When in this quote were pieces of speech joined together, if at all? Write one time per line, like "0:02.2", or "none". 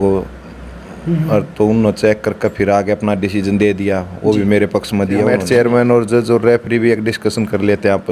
0:05.4